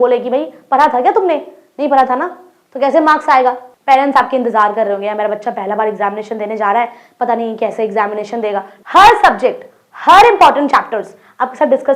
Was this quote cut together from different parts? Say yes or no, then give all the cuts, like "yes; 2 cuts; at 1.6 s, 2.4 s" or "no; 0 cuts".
yes; 2 cuts; at 3.7 s, 8.7 s